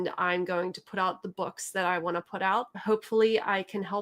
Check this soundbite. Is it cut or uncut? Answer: cut